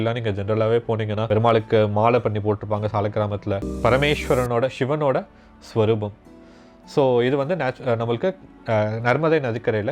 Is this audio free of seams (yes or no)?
no